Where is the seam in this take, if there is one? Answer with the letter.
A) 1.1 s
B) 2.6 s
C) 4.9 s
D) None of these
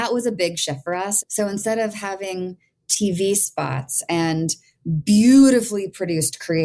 A